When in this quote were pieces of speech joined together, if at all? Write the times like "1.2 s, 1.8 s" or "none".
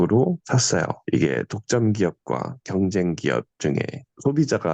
1.0 s